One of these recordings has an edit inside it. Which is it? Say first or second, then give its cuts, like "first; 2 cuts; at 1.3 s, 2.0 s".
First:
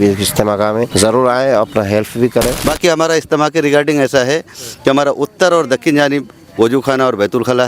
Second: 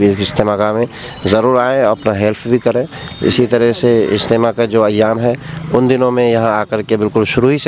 first; 2 cuts; at 0.9 s, 2.6 s